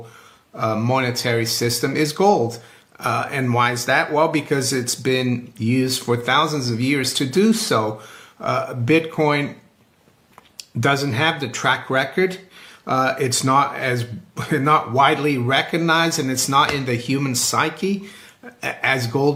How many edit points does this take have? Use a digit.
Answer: 0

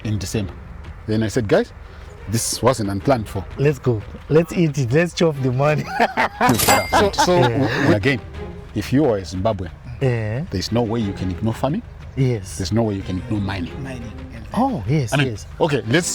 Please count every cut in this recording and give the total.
1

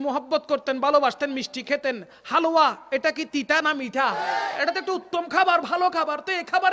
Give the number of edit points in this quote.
1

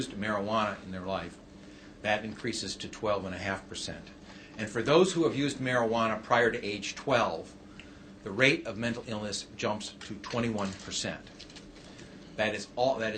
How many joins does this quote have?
1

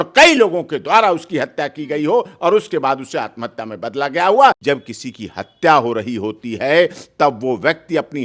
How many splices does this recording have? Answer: 1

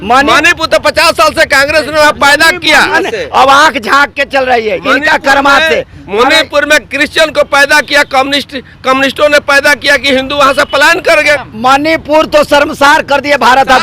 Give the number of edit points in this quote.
2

